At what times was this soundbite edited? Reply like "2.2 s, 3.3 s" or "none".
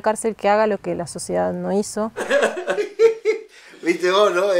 2.2 s